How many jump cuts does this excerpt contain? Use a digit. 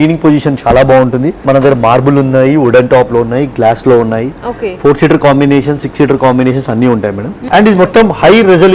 2